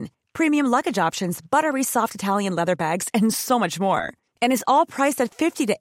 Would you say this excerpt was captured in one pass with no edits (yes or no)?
yes